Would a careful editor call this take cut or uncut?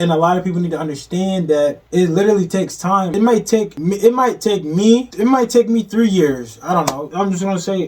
cut